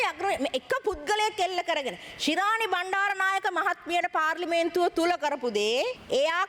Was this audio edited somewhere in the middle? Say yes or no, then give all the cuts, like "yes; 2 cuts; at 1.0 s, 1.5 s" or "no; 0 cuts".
no; 0 cuts